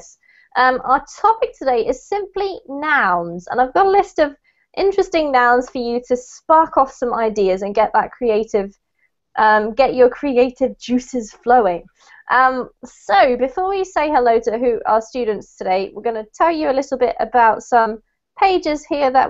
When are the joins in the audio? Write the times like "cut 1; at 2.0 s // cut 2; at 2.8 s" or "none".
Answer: none